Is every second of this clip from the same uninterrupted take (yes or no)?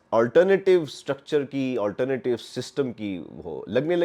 yes